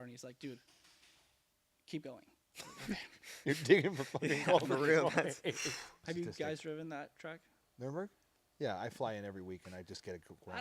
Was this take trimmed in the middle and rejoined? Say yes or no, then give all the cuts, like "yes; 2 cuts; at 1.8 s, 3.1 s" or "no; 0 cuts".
yes; 1 cut; at 6.0 s